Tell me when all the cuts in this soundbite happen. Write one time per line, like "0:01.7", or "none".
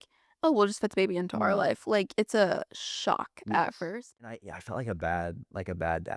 0:04.5